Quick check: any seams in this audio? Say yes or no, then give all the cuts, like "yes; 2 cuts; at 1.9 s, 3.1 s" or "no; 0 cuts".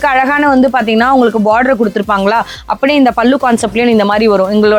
no; 0 cuts